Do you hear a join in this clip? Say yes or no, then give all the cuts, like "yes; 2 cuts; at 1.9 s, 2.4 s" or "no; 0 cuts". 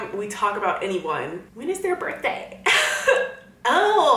yes; 1 cut; at 1.5 s